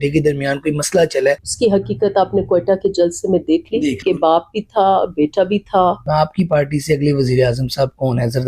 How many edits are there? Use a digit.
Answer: 3